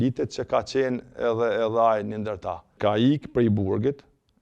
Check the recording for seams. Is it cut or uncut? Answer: cut